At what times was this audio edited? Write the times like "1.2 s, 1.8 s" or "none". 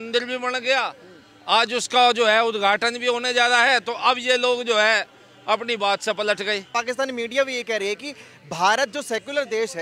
6.7 s